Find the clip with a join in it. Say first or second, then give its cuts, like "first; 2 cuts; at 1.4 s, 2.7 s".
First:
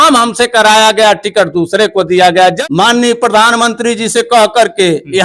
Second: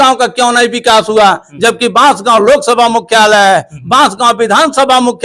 first; 1 cut; at 2.6 s